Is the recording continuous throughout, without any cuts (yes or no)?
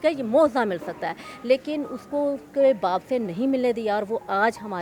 yes